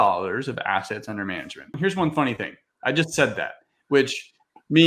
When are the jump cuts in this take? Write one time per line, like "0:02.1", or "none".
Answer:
0:01.7